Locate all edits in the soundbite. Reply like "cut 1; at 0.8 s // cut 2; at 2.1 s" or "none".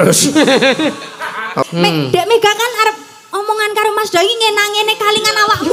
cut 1; at 1.6 s

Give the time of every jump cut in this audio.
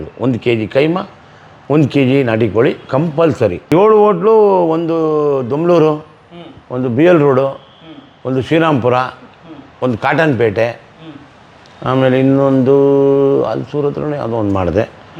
cut 1; at 3.7 s

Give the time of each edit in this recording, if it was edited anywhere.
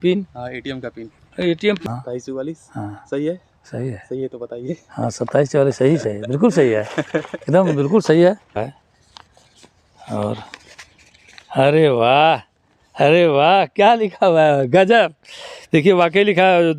cut 1; at 1.8 s // cut 2; at 8.7 s

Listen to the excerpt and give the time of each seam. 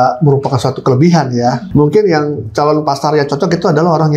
cut 1; at 1.7 s

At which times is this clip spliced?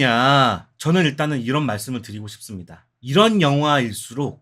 none

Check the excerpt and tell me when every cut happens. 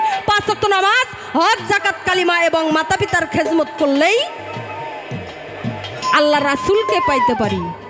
none

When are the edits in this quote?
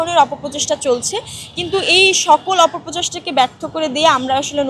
none

